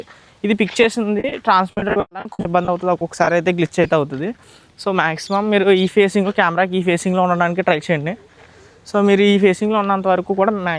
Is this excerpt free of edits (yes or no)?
yes